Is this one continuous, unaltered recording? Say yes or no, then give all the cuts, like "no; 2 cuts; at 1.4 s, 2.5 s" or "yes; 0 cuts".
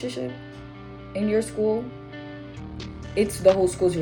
yes; 0 cuts